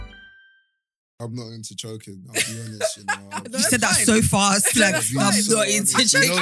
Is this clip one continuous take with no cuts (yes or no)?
no